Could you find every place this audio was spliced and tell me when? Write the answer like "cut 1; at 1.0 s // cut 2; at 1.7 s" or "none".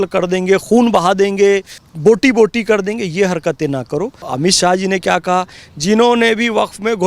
cut 1; at 1.8 s // cut 2; at 4.2 s